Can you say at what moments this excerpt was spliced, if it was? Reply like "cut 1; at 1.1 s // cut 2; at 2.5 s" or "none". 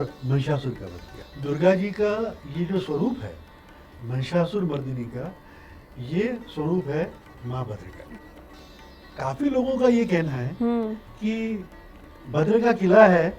cut 1; at 1.1 s // cut 2; at 8.3 s